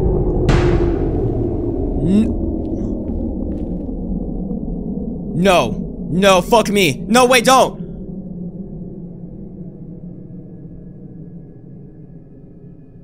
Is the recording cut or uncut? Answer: uncut